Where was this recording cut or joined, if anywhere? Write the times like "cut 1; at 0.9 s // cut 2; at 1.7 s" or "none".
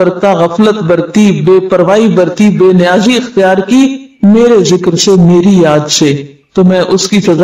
none